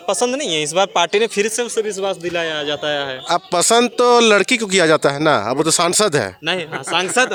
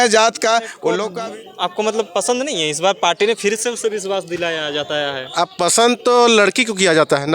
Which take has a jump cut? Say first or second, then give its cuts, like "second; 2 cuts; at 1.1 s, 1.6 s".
second; 1 cut; at 1.0 s